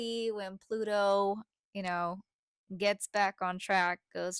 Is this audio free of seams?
yes; 0 cuts

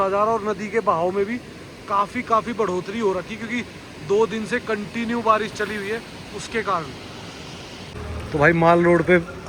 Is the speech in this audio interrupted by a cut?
yes; 1 cut; at 8.0 s

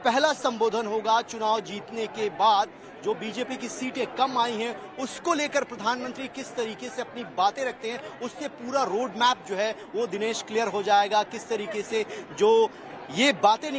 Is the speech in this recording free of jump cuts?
yes; 0 cuts

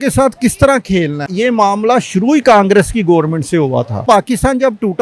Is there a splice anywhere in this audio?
yes; 2 cuts; at 1.3 s, 4.0 s

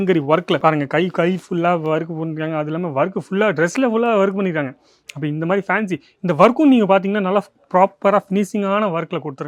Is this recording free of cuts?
yes; 0 cuts

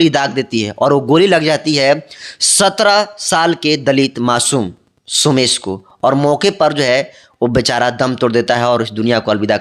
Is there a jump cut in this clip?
no; 0 cuts

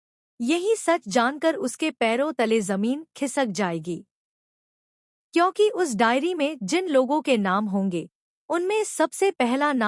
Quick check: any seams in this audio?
no; 0 cuts

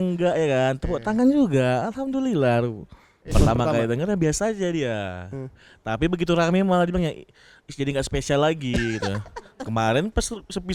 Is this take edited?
yes; 1 cut; at 3.1 s

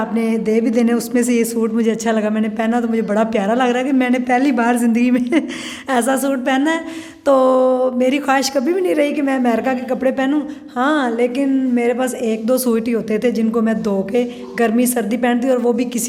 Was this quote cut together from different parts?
no; 0 cuts

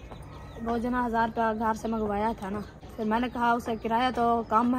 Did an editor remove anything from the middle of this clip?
yes; 1 cut; at 2.8 s

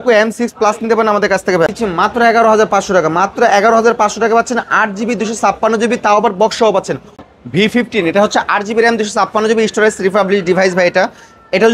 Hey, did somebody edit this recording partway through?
yes; 2 cuts; at 1.7 s, 7.1 s

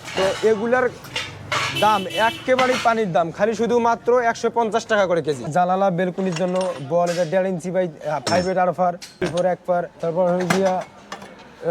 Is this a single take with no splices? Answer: no; 3 cuts; at 5.4 s, 9.2 s, 9.9 s

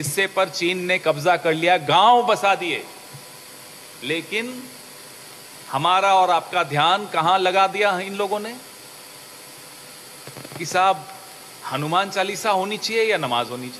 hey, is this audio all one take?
yes; 0 cuts

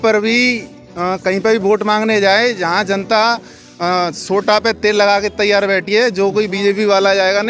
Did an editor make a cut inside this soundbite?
no; 0 cuts

